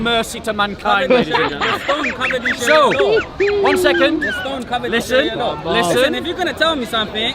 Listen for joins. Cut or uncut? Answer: uncut